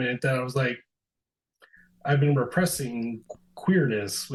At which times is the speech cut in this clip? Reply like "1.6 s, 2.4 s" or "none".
none

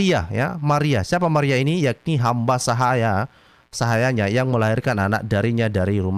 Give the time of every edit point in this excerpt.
none

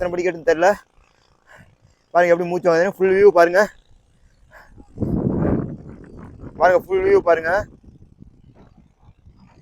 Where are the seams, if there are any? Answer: none

